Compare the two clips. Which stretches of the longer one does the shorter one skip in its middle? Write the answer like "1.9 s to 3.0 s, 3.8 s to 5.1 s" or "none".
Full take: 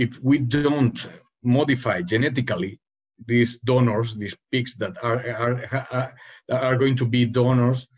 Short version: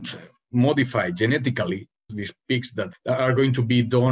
3.3 s to 5.8 s